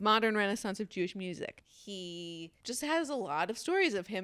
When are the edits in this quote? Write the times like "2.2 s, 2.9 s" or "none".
1.9 s